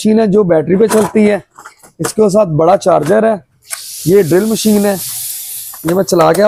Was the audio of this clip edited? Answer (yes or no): no